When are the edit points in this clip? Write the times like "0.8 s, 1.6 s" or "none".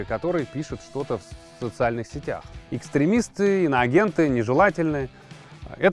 2.5 s